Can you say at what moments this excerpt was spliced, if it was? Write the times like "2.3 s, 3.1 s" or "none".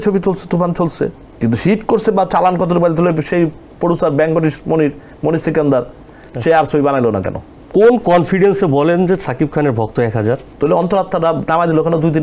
none